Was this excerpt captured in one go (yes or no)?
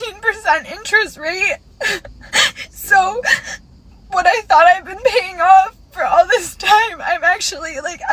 yes